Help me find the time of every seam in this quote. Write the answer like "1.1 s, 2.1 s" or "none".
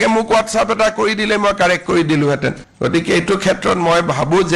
none